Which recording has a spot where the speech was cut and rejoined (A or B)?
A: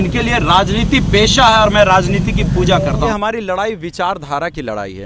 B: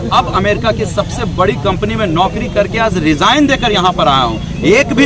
A